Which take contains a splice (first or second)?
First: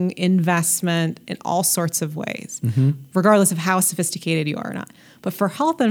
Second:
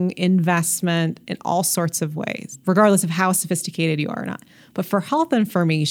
second